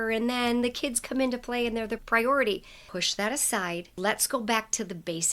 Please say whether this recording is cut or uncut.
cut